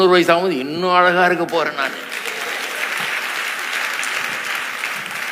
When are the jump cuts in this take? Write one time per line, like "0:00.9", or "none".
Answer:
none